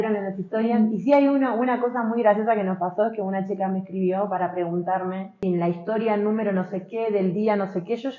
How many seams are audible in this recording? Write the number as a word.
one